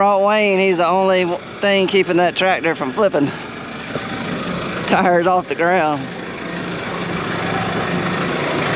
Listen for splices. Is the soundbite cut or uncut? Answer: uncut